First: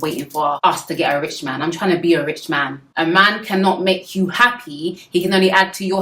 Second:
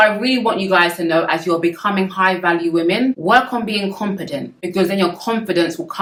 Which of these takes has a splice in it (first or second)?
first